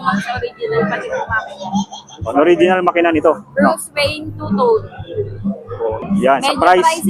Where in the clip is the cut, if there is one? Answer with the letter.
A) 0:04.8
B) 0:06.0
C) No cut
B